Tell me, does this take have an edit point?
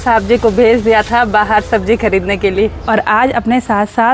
yes; 1 cut; at 2.9 s

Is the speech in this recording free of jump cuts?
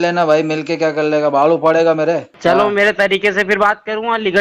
no; 1 cut; at 2.3 s

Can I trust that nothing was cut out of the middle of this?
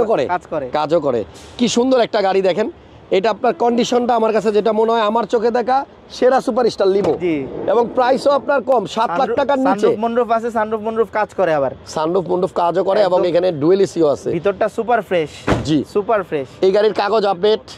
yes; 0 cuts

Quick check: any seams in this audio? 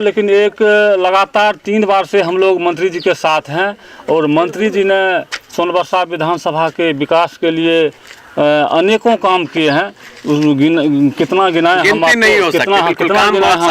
no; 0 cuts

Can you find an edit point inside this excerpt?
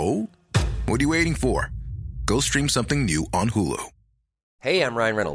no; 0 cuts

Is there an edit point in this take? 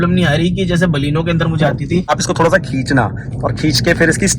yes; 1 cut; at 2.1 s

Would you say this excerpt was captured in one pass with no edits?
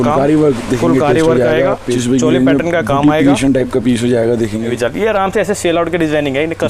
no; 2 cuts; at 2.0 s, 4.7 s

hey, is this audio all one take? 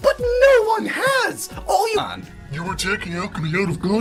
yes; 0 cuts

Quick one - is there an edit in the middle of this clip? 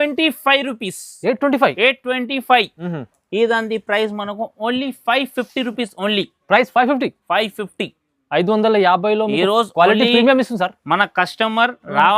yes; 1 cut; at 2.8 s

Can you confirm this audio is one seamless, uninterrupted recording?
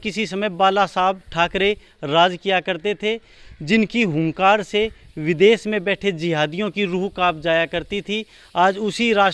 yes; 0 cuts

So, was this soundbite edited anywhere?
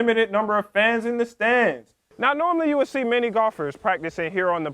yes; 1 cut; at 2.1 s

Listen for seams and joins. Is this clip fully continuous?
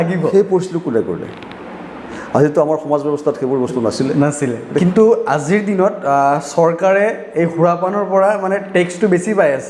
no; 1 cut; at 4.8 s

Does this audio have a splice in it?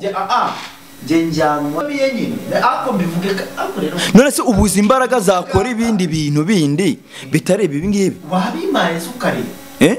yes; 1 cut; at 1.8 s

